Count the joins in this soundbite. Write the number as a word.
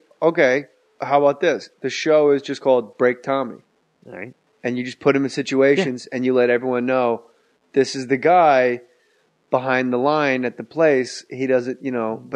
one